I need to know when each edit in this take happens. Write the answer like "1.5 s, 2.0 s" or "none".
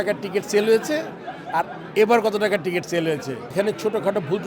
3.5 s